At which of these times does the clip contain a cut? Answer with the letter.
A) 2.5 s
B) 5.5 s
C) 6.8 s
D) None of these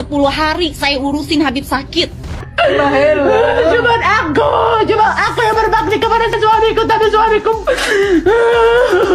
A